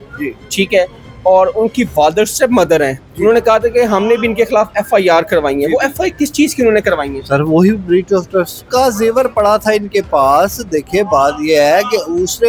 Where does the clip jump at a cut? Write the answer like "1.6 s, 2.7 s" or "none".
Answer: 8.6 s